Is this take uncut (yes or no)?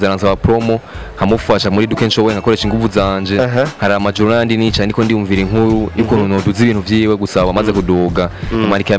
yes